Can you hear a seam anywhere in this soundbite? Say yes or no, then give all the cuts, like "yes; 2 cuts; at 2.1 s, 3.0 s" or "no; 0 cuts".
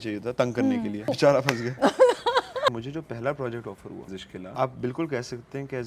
yes; 3 cuts; at 1.1 s, 2.7 s, 4.5 s